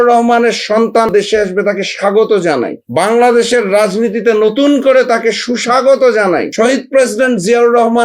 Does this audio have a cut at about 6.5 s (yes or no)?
yes